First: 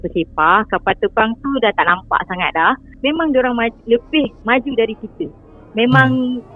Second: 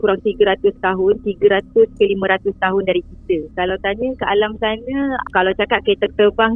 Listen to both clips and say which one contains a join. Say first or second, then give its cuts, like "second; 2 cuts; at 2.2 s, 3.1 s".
first; 2 cuts; at 3.0 s, 4.4 s